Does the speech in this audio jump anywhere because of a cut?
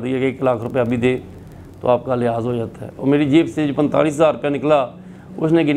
no; 0 cuts

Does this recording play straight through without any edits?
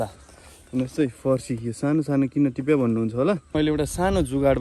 no; 1 cut; at 3.5 s

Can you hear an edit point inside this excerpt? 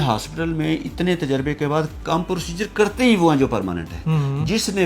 yes; 1 cut; at 3.9 s

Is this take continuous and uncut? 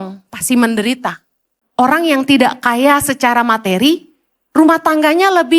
no; 1 cut; at 1.5 s

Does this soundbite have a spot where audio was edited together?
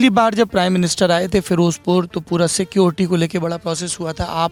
no; 0 cuts

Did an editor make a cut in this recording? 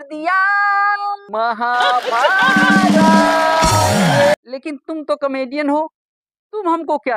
yes; 1 cut; at 4.3 s

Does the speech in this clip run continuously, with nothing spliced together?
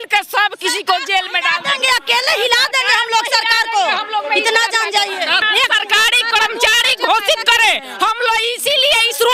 no; 1 cut; at 5.4 s

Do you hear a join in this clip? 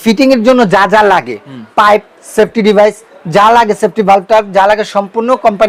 no; 0 cuts

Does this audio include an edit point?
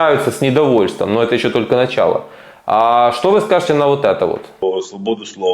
yes; 1 cut; at 4.5 s

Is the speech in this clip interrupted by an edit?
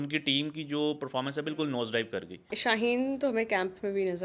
yes; 1 cut; at 2.5 s

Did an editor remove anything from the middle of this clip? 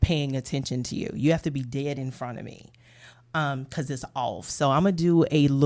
no; 0 cuts

